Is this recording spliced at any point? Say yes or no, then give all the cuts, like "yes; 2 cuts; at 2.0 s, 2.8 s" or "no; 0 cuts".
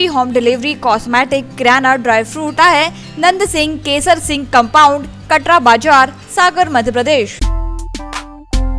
yes; 2 cuts; at 2.5 s, 7.4 s